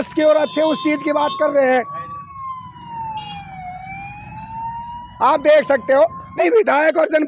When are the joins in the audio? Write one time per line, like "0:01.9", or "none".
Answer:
0:06.3